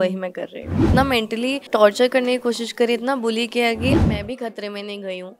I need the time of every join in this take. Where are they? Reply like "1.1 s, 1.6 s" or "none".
0.8 s, 4.0 s